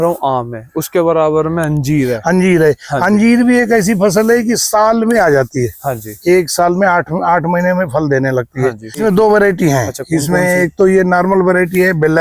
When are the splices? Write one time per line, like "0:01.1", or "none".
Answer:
0:09.0